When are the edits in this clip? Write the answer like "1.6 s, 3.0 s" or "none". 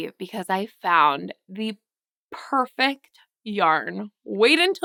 none